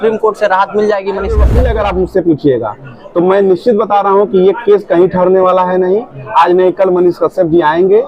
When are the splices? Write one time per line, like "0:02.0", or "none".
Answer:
0:01.5